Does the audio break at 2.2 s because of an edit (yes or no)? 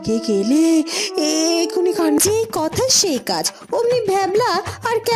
yes